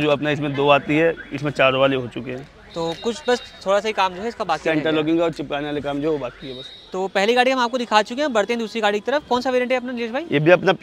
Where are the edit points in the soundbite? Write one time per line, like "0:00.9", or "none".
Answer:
none

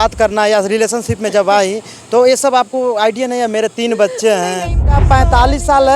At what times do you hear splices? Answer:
0:05.0

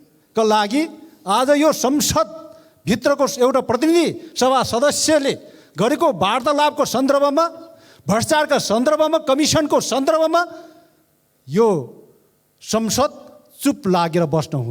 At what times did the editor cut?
none

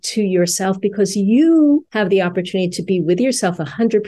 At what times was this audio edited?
0:01.9

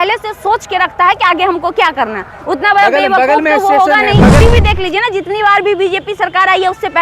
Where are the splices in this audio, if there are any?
0:04.4

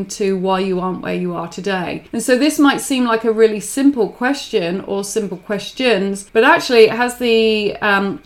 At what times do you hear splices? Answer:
0:02.0
0:06.2

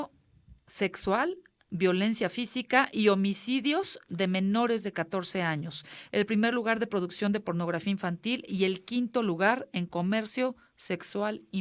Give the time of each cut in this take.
0:08.4

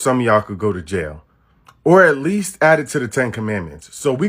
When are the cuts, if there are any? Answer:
none

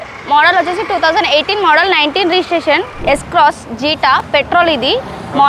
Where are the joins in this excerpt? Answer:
0:03.0

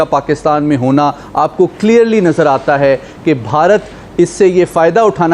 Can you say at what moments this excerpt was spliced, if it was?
none

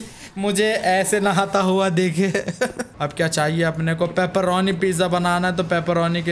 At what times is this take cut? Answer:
0:02.8

